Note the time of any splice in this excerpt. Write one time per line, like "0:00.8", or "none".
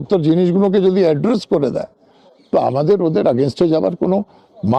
none